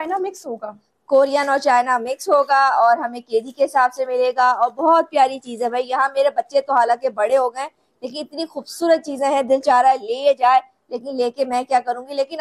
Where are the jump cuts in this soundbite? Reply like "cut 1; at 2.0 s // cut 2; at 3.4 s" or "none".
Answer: none